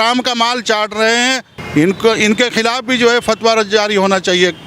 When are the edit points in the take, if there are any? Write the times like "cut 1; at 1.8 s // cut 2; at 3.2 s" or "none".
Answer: cut 1; at 1.5 s